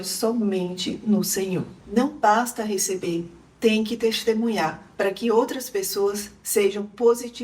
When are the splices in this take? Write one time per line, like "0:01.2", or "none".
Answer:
0:01.8